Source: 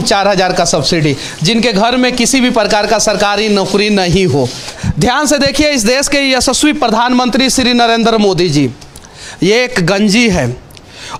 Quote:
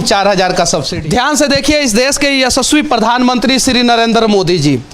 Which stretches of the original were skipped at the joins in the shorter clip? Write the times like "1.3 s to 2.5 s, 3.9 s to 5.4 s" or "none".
0.9 s to 4.8 s

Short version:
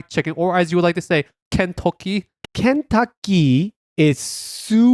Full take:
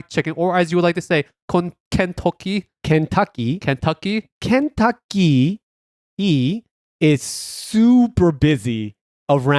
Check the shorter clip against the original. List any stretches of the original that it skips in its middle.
1.4 s to 1.8 s, 2.8 s to 4.3 s, 5.7 s to 6.8 s

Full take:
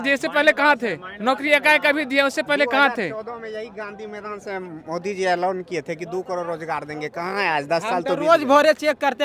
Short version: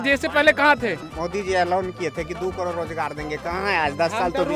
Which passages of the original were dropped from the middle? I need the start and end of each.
1.1 s to 4.8 s

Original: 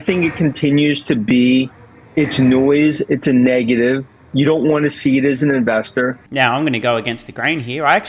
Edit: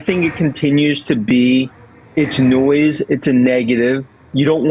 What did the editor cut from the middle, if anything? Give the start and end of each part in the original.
none

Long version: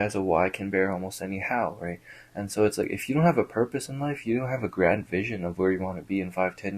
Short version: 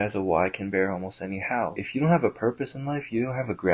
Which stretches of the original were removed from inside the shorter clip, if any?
1.8 s to 3.0 s

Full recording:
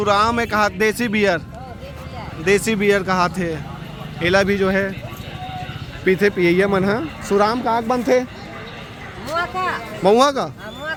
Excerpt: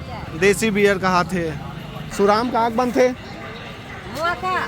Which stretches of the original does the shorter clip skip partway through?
4.1 s to 7.1 s

